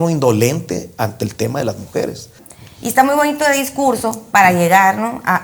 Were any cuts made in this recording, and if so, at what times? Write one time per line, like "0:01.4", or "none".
0:02.4